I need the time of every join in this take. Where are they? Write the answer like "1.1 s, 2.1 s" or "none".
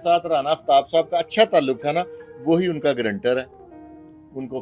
none